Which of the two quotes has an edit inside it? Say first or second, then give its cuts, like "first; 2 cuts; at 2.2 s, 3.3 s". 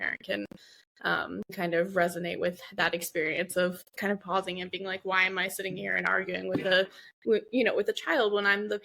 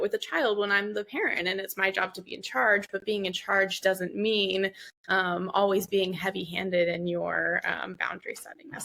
first; 1 cut; at 1.5 s